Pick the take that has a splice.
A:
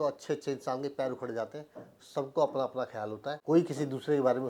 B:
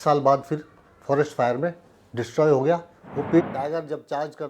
B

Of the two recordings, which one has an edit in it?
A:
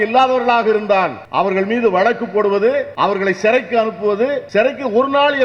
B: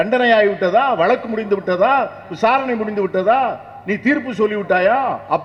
A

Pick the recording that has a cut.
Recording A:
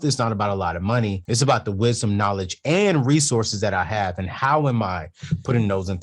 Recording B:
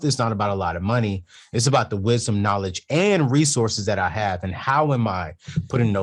A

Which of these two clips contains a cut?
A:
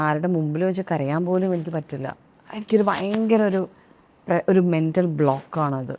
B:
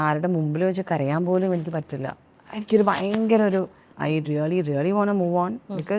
B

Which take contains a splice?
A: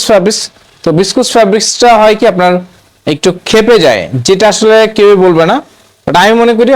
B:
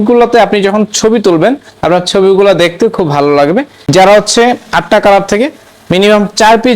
B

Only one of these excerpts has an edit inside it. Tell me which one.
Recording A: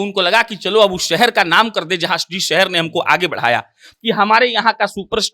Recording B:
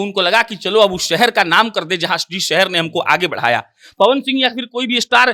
A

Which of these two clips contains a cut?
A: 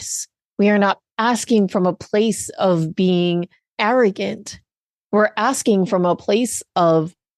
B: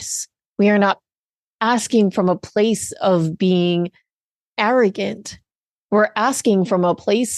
A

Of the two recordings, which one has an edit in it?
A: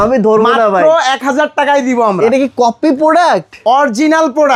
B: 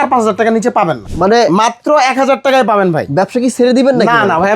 B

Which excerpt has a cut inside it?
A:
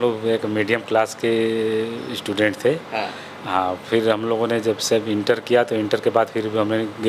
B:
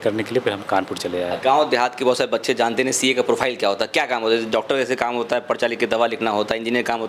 B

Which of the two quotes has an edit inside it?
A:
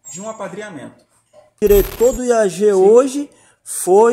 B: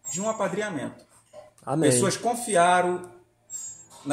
A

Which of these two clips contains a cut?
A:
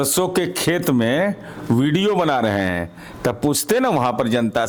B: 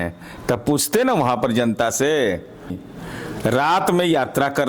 B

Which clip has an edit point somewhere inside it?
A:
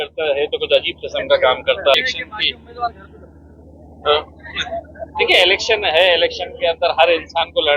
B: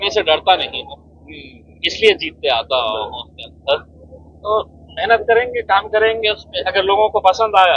A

